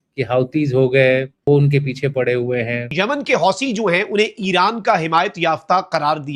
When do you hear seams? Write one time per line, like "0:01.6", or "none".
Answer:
0:01.4
0:02.9